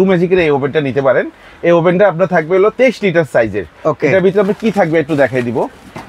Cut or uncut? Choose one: uncut